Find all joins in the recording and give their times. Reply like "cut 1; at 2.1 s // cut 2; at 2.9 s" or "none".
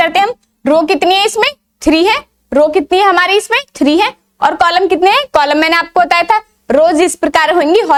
none

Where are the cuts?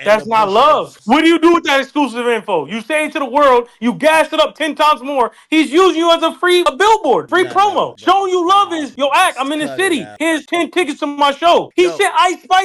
cut 1; at 0.9 s // cut 2; at 10.2 s // cut 3; at 11.7 s

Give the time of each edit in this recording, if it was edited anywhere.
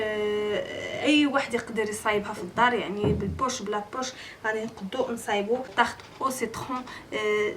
cut 1; at 5.7 s

